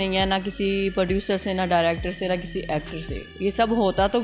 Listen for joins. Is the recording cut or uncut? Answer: uncut